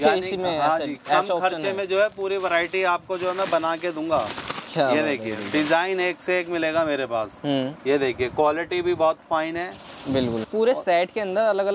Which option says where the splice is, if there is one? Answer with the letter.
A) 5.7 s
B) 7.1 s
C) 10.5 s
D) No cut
C